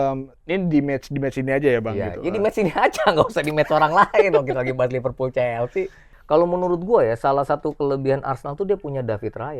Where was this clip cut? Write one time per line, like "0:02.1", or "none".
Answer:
0:06.0